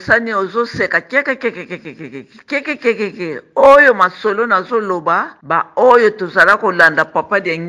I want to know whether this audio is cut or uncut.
cut